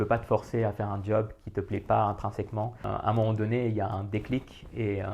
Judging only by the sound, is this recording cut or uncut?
cut